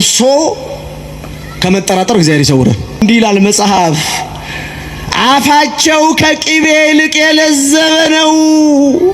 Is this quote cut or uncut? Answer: cut